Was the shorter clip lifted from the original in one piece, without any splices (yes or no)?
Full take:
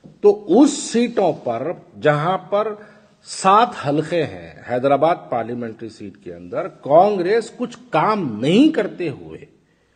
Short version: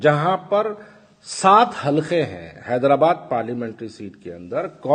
yes